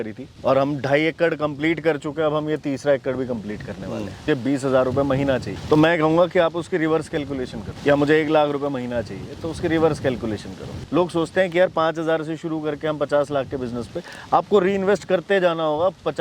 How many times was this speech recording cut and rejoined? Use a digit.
2